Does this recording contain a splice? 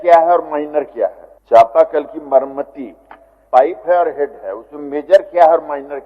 yes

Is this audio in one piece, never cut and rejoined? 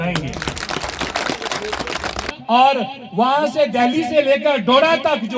no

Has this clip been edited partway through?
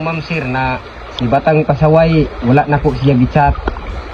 no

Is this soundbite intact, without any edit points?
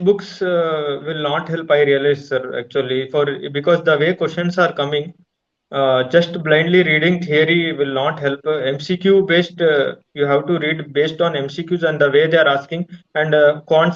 yes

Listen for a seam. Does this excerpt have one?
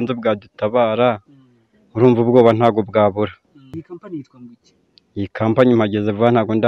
yes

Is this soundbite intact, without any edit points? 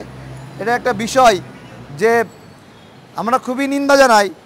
yes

